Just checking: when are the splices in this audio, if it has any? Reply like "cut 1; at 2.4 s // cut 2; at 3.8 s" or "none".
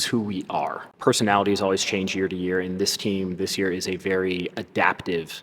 cut 1; at 0.9 s